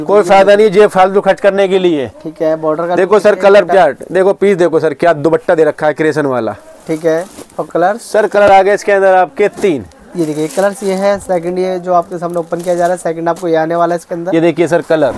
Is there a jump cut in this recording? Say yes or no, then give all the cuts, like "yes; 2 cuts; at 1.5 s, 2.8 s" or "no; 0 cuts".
no; 0 cuts